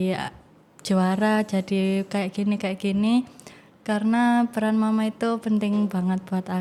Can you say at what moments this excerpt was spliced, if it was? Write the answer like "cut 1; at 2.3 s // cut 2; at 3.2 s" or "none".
none